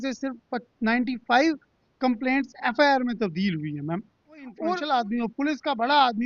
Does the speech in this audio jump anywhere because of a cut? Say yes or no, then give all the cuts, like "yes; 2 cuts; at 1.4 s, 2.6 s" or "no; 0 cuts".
yes; 1 cut; at 4.5 s